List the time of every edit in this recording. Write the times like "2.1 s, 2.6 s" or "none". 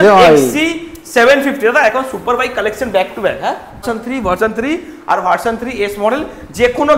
3.8 s

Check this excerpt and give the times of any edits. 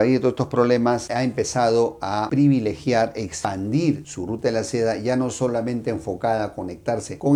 none

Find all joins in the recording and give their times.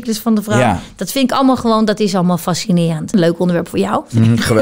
3.1 s

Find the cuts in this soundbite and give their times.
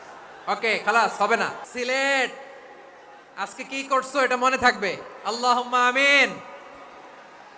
1.6 s

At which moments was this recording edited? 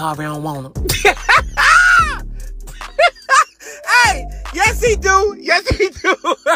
none

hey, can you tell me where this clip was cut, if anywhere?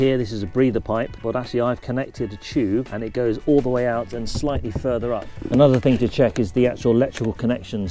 1.2 s, 2.9 s, 5.3 s

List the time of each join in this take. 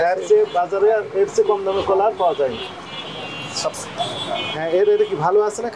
3.8 s

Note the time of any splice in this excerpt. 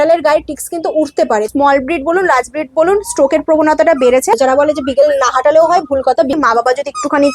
1.5 s, 4.4 s, 6.4 s

